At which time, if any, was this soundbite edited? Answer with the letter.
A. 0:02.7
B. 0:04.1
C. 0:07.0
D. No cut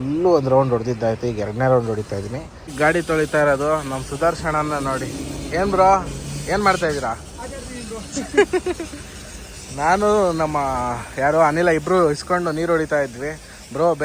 A